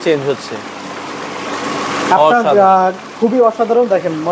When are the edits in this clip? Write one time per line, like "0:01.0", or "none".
none